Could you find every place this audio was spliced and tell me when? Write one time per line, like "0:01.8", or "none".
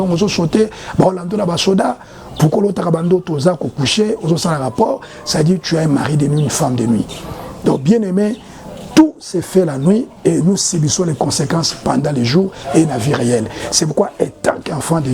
none